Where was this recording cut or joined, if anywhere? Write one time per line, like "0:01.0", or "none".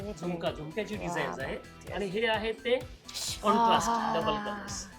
0:01.8